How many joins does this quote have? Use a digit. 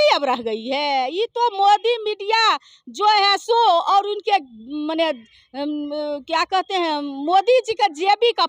0